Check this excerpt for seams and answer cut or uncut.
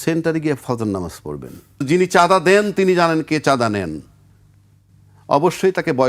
cut